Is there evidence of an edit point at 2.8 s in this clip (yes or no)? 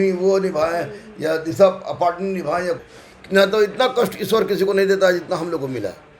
yes